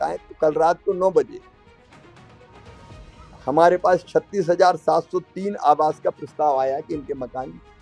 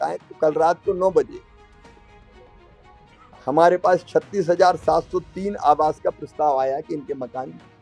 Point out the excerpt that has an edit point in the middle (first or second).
first